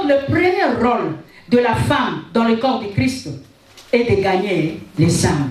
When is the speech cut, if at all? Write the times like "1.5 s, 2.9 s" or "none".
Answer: none